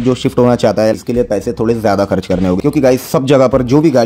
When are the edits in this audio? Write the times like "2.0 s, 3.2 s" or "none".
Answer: none